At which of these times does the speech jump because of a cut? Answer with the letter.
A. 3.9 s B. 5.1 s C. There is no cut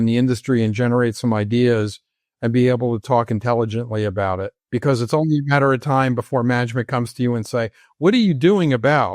B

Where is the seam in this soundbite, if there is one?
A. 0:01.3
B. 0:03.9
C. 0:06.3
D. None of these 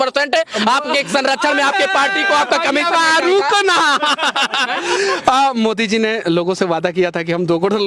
D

